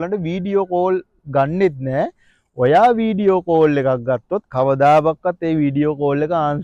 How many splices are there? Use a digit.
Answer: 0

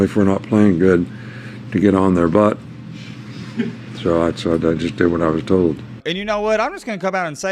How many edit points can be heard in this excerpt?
1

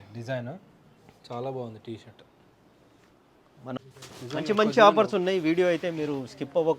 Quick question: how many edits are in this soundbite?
1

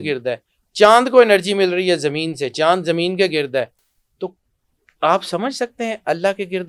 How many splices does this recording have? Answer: 0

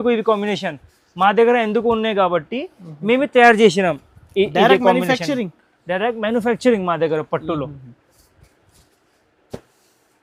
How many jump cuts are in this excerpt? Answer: 0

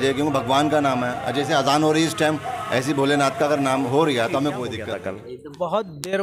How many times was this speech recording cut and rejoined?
1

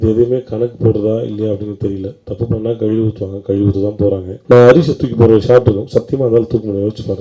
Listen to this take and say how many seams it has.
1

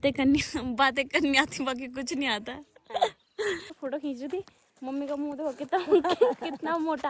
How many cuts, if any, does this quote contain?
1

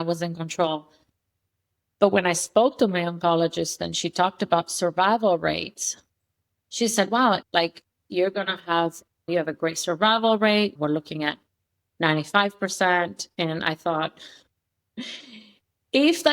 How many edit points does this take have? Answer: 3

